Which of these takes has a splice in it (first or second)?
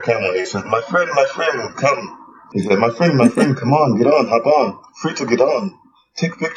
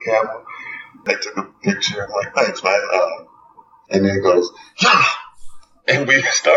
second